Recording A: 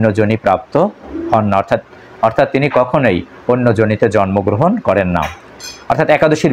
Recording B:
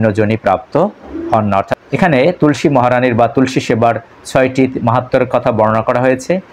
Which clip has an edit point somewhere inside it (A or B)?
B